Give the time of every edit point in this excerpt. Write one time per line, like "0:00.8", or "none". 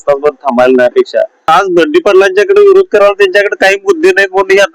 0:01.5